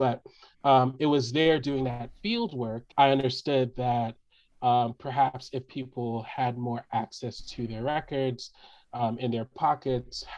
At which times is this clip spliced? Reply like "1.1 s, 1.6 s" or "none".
2.8 s

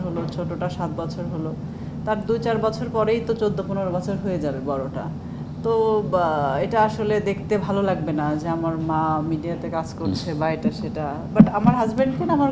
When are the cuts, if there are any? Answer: none

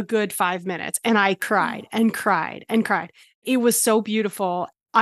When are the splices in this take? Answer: none

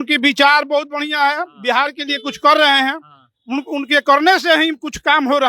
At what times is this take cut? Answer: none

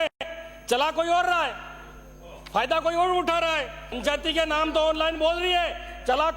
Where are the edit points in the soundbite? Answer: 4.0 s

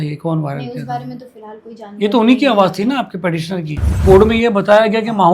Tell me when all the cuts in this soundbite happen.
3.9 s

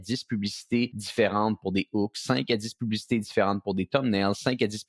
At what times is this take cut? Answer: 1.0 s

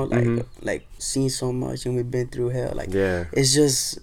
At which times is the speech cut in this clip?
1.0 s

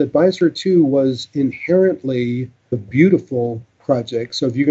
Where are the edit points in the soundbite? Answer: 2.8 s

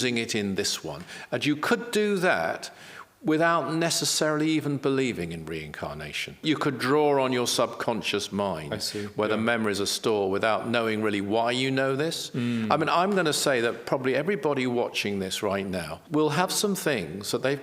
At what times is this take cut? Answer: 6.4 s, 15.9 s

